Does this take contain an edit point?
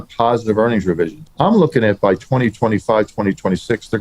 yes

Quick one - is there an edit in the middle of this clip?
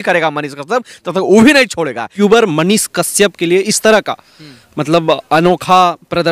yes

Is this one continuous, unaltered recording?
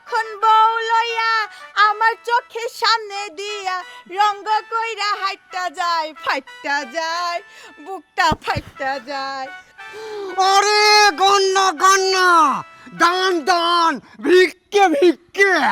no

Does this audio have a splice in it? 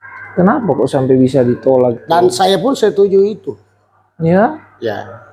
no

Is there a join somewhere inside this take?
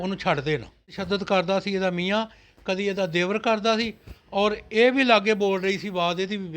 yes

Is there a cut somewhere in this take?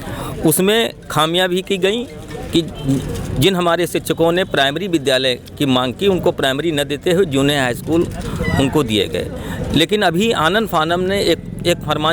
no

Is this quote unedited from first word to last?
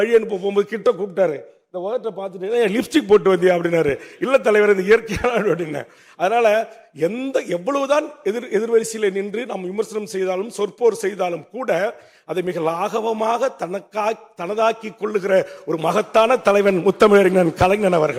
yes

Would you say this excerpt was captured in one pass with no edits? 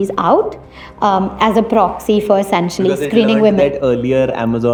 yes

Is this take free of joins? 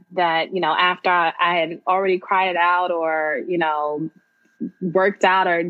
yes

